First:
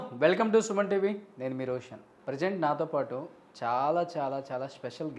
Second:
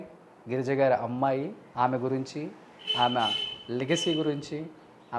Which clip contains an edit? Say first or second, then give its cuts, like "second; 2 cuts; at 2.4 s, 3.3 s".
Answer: second; 1 cut; at 1.6 s